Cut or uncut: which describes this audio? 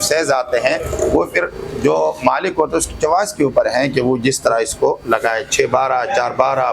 uncut